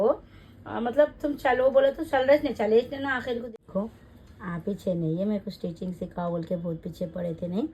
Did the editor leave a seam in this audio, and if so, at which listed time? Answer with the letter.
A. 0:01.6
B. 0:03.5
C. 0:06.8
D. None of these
B